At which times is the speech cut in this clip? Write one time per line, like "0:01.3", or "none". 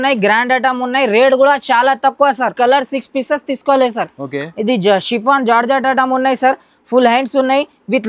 0:02.5